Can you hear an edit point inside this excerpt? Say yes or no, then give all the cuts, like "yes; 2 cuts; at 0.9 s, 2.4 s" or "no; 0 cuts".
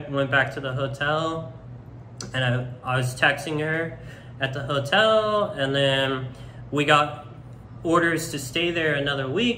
no; 0 cuts